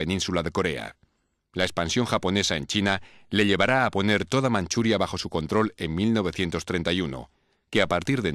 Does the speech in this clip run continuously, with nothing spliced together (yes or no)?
yes